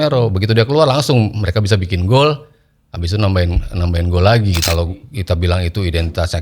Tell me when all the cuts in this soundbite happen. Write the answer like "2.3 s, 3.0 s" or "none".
4.6 s